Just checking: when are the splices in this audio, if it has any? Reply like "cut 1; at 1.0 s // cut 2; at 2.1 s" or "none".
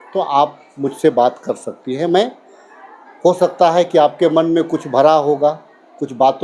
none